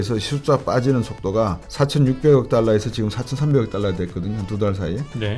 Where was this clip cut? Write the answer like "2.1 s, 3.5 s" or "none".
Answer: 1.6 s